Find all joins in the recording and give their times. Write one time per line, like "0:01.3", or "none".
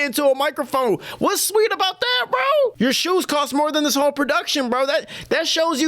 0:02.7